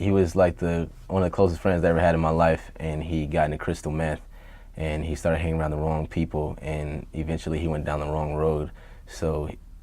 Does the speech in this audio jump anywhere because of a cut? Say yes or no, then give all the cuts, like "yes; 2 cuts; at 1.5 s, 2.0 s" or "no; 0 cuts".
yes; 1 cut; at 5.1 s